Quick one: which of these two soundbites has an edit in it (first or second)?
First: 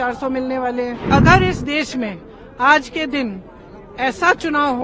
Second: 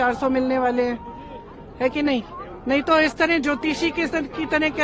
first